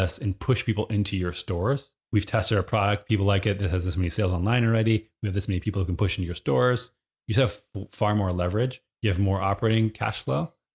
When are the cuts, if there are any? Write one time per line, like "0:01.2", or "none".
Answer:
0:01.9